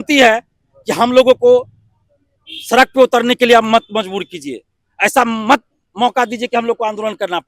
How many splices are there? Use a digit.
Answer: 0